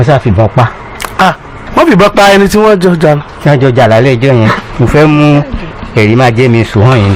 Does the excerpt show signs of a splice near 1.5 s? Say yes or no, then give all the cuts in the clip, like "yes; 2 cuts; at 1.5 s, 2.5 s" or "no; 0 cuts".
no; 0 cuts